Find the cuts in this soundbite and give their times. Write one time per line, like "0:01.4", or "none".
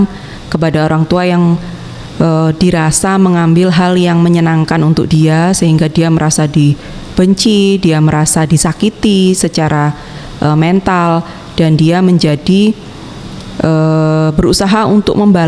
none